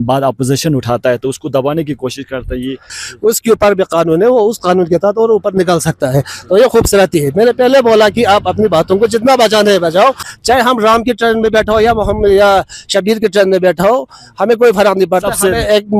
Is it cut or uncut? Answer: cut